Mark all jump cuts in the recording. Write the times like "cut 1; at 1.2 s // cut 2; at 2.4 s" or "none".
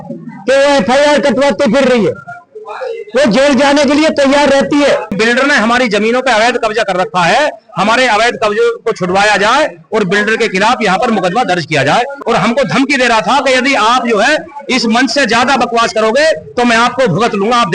cut 1; at 5.2 s // cut 2; at 12.1 s